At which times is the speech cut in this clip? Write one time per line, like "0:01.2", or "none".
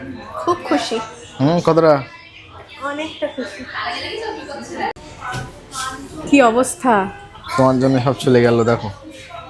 none